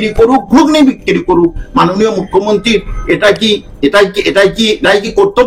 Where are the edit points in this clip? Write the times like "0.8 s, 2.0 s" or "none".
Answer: none

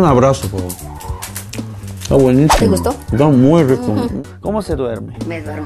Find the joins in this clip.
4.1 s

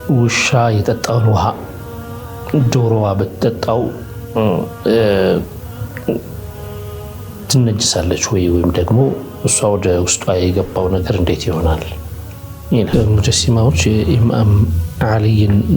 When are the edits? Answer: 12.9 s

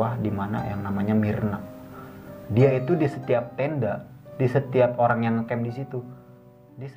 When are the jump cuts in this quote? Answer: none

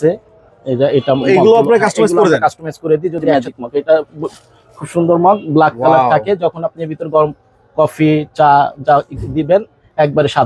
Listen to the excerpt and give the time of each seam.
3.3 s

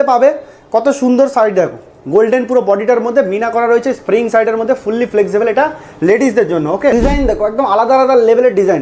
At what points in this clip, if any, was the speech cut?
6.9 s

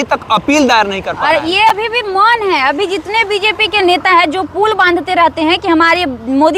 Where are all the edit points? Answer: none

